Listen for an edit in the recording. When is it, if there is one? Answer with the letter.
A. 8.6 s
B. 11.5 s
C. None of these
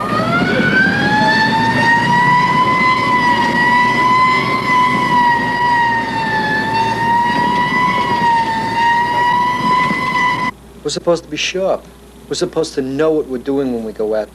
B